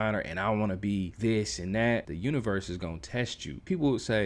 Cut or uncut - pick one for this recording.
cut